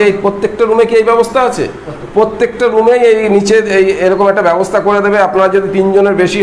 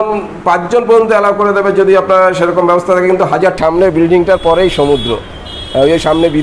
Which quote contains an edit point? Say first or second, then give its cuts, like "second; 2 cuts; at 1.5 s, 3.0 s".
second; 1 cut; at 3.6 s